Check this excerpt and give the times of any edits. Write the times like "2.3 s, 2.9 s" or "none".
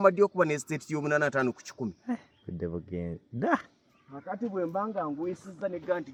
none